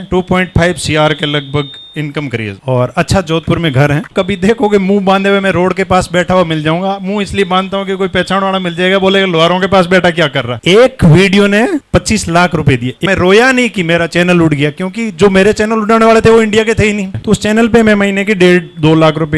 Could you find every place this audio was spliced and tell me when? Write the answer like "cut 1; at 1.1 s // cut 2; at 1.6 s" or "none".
cut 1; at 4.1 s // cut 2; at 13.0 s // cut 3; at 17.1 s

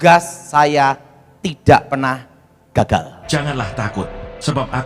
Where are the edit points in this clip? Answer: cut 1; at 3.2 s

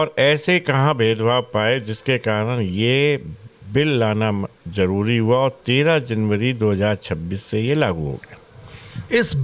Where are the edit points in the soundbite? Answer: none

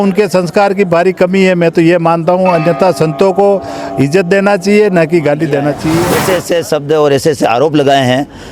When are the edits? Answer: cut 1; at 6.1 s

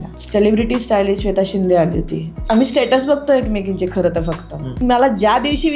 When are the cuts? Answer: cut 1; at 2.3 s // cut 2; at 4.8 s

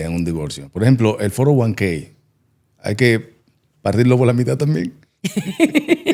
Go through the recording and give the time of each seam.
none

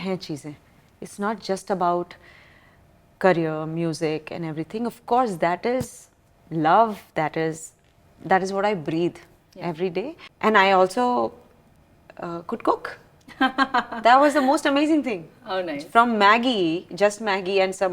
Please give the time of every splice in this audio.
cut 1; at 10.2 s

